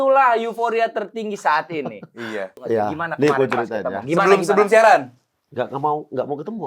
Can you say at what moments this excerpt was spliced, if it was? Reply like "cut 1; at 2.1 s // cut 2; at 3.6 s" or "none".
cut 1; at 2.5 s